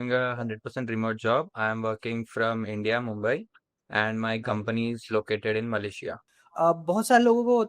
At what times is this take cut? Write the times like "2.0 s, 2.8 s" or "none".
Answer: 6.3 s

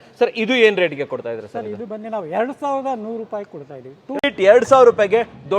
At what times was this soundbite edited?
4.3 s

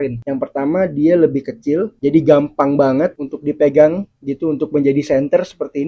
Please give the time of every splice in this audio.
none

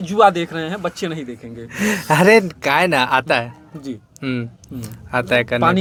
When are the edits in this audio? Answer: none

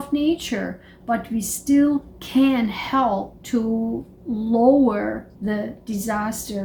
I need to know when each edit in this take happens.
none

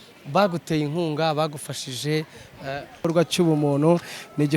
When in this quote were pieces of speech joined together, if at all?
3.0 s

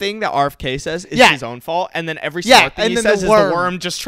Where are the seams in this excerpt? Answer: none

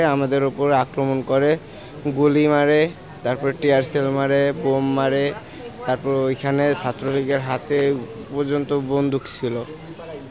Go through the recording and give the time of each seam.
none

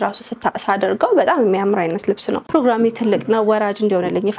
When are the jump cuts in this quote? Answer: 2.4 s

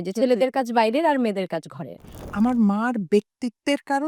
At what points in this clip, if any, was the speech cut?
2.2 s

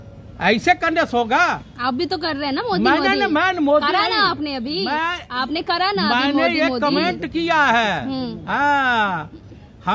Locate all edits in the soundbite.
none

